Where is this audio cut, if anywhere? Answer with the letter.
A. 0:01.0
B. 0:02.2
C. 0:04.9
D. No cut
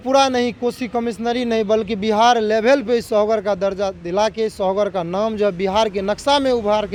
D